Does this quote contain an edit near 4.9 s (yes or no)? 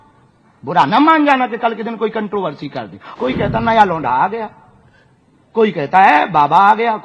no